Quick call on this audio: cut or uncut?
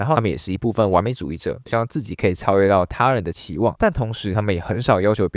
cut